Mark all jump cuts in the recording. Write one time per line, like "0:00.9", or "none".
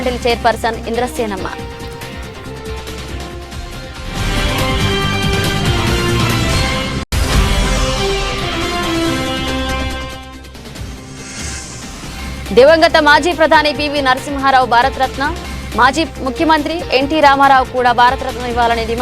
none